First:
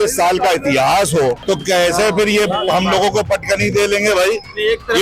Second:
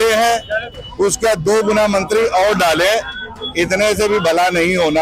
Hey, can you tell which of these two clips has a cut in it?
first; 1 cut; at 1.4 s

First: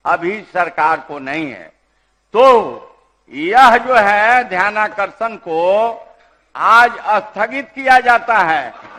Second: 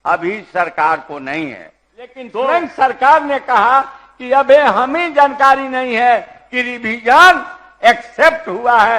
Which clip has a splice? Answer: second; 1 cut; at 2.2 s

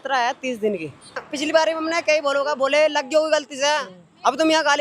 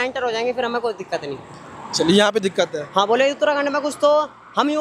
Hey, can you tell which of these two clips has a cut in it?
first; 1 cut; at 1.2 s

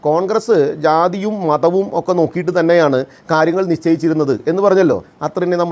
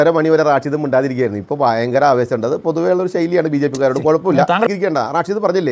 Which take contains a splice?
second; 1 cut; at 4.7 s

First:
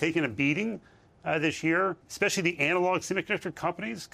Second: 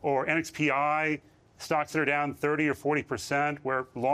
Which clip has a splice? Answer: first; 1 cut; at 2.0 s

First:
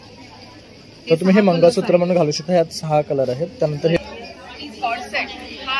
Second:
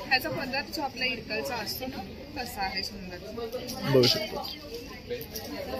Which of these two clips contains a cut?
first; 1 cut; at 4.0 s

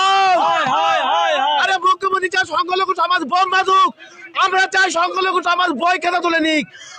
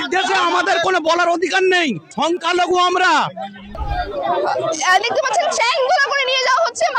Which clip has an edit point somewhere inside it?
second; 2 cuts; at 2.0 s, 3.6 s

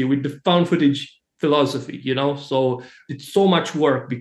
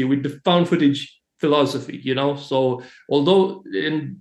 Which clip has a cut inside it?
first; 1 cut; at 2.9 s

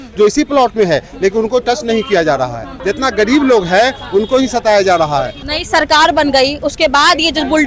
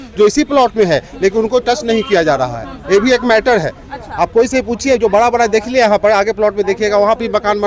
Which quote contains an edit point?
first; 2 cuts; at 2.7 s, 5.4 s

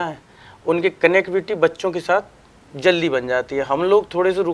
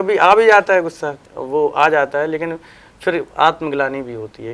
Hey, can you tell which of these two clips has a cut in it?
second; 1 cut; at 1.1 s

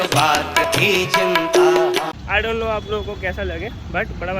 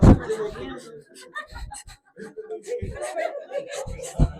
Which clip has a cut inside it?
first; 1 cut; at 2.1 s

